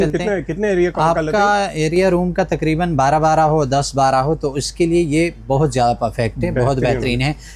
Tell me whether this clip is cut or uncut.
uncut